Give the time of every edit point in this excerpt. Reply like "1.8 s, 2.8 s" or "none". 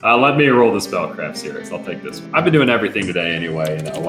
2.1 s